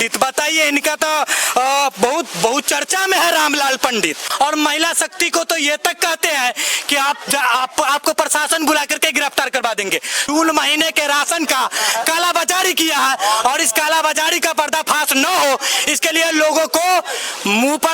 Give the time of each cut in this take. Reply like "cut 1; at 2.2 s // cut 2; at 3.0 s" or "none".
cut 1; at 4.2 s // cut 2; at 10.2 s